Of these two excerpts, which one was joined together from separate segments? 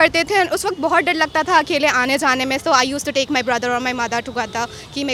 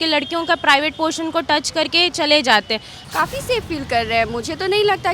second; 1 cut; at 2.9 s

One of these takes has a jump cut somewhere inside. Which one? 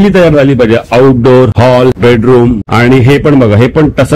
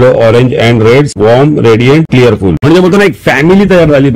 second; 1 cut; at 2.6 s

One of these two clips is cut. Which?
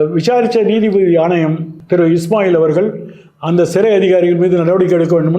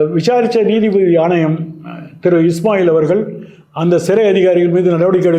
first; 1 cut; at 1.7 s

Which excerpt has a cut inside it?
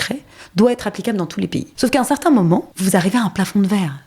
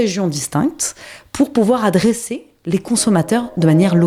first; 2 cuts; at 1.6 s, 2.7 s

